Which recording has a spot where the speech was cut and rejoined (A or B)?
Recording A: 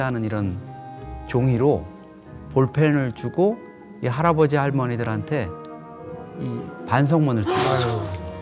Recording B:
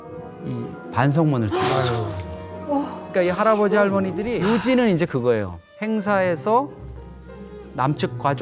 B